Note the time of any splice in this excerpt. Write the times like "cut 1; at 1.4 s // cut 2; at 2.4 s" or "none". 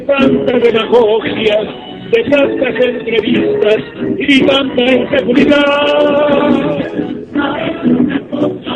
cut 1; at 6.8 s